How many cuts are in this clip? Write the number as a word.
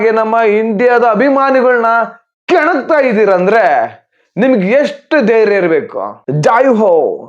one